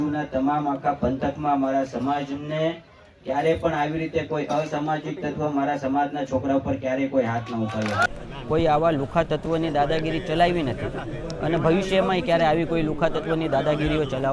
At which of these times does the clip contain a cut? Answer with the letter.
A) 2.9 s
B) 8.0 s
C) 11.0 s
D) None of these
B